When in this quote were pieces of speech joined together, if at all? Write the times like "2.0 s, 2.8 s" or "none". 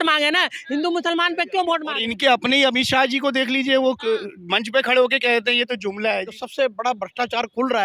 2.0 s, 6.4 s